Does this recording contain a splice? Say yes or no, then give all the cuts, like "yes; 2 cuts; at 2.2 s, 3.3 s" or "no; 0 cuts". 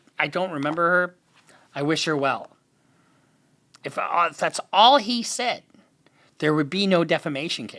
no; 0 cuts